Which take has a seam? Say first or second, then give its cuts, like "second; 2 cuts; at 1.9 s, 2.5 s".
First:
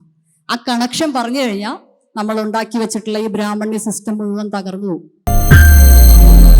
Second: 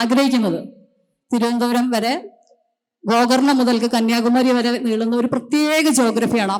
first; 1 cut; at 5.3 s